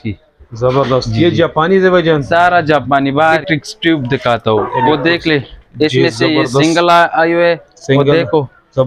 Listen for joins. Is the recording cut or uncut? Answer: cut